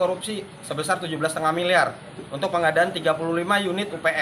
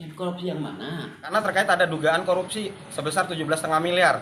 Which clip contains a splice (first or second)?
second